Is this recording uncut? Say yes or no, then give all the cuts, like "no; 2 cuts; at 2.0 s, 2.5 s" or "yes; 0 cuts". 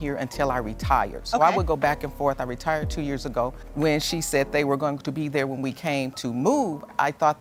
yes; 0 cuts